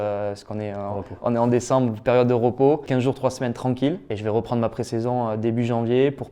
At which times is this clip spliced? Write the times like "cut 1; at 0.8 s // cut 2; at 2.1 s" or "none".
cut 1; at 2.8 s // cut 2; at 4.1 s